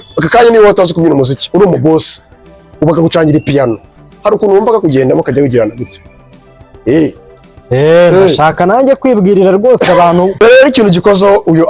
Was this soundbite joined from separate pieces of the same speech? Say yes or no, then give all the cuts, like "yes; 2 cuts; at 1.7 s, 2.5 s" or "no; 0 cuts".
yes; 1 cut; at 10.3 s